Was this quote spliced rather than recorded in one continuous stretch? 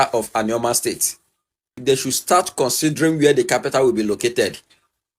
yes; 1 cut; at 1.7 s

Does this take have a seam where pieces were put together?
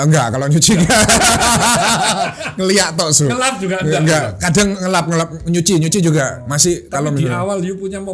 no; 0 cuts

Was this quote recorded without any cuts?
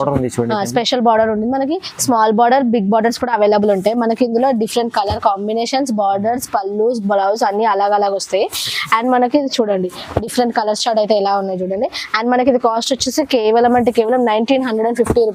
yes; 0 cuts

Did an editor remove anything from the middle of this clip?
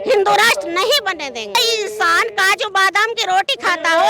yes; 1 cut; at 1.5 s

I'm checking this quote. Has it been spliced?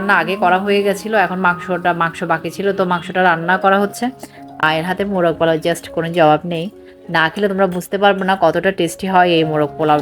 yes; 1 cut; at 4.6 s

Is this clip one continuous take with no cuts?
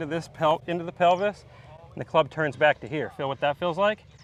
yes; 0 cuts

